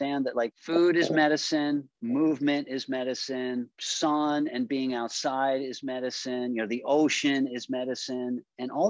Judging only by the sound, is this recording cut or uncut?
uncut